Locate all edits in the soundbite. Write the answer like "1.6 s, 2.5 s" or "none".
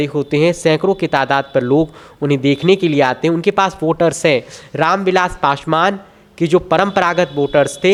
none